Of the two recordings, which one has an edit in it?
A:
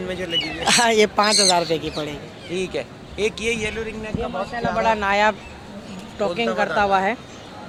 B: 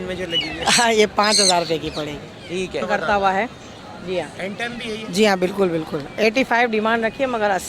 B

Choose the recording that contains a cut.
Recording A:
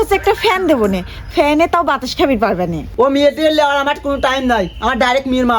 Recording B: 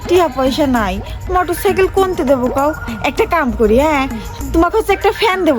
A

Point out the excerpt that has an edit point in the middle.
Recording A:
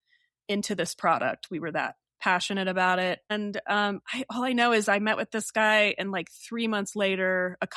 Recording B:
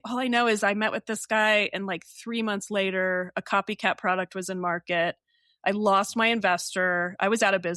A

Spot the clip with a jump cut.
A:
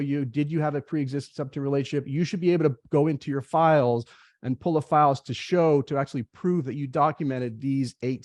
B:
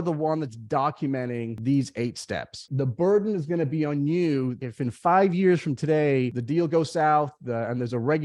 B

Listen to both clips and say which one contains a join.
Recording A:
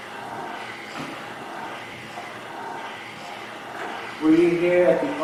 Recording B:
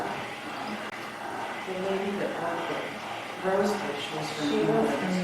B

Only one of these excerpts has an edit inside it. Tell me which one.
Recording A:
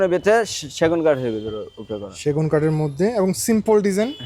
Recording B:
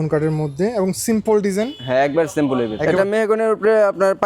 B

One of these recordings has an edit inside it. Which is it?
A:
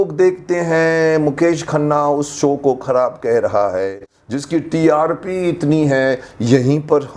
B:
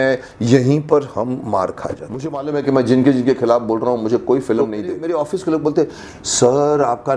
B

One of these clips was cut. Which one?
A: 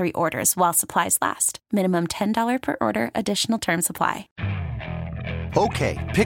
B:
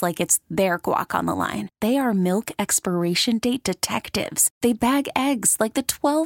A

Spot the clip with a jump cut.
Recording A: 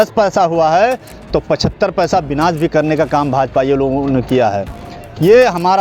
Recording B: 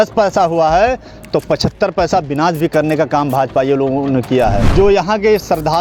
B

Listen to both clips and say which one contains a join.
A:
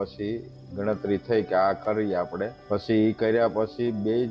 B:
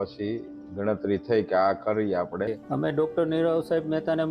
B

